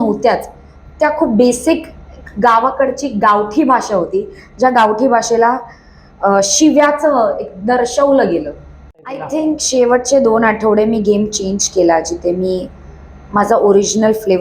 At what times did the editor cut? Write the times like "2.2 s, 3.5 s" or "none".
9.2 s